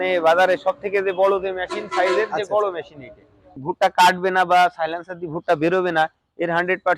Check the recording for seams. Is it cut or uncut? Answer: cut